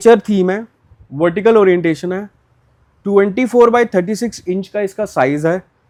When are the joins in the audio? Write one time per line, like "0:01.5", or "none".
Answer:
none